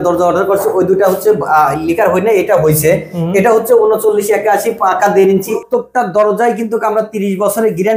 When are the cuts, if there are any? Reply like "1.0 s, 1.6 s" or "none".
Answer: 5.6 s